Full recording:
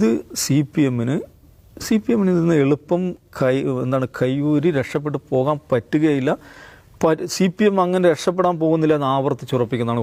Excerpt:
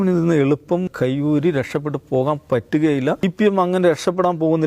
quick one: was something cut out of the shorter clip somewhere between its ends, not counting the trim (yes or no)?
yes